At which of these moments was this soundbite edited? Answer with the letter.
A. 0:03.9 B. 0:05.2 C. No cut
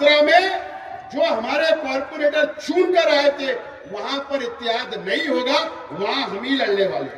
C